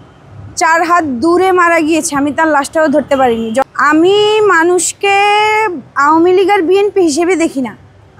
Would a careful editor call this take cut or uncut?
cut